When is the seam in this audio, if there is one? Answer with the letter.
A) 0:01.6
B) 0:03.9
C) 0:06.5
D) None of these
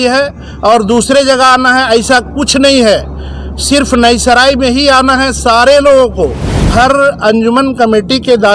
C